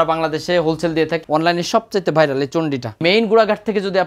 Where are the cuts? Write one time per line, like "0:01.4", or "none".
0:01.2
0:03.0